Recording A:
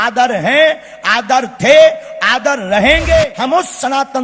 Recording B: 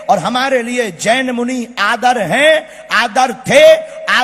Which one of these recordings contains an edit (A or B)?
A